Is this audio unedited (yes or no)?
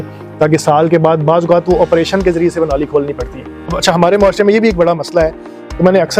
no